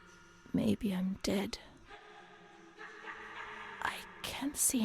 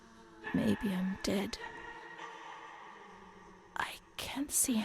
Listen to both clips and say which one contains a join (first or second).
second